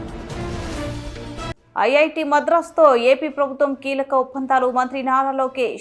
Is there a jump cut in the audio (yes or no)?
no